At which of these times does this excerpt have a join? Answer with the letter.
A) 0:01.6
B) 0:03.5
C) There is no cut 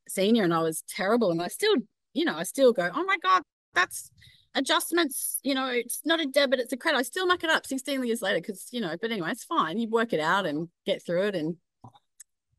C